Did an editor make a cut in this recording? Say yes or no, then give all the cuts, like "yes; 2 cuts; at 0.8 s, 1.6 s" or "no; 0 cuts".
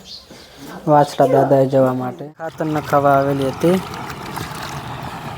yes; 1 cut; at 2.6 s